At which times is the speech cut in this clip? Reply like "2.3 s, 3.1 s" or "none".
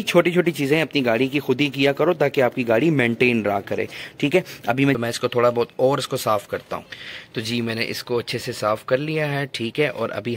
5.0 s